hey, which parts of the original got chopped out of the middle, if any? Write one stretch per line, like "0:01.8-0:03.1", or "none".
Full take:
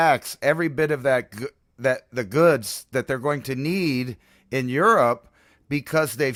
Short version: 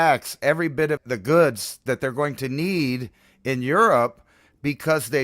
0:01.0-0:02.1